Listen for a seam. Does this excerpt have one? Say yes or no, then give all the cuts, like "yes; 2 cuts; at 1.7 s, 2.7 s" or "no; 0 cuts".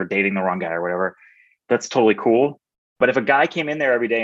yes; 2 cuts; at 1.5 s, 3.0 s